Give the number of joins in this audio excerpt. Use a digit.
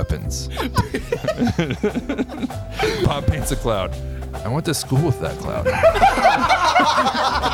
1